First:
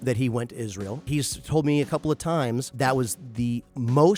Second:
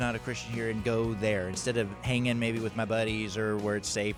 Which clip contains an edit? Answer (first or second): first